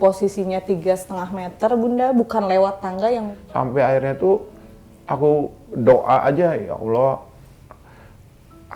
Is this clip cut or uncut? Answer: cut